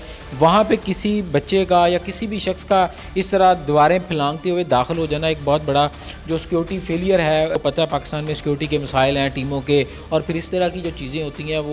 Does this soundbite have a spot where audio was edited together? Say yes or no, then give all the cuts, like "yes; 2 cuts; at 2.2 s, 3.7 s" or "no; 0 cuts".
yes; 1 cut; at 7.6 s